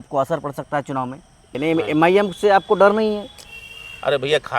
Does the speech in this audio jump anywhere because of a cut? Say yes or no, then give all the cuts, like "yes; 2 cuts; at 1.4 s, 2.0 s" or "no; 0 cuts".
yes; 1 cut; at 1.5 s